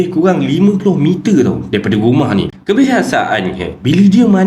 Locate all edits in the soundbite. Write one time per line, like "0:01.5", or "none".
0:02.5